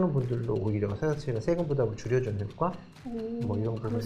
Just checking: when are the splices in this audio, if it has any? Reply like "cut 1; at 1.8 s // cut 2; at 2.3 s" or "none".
none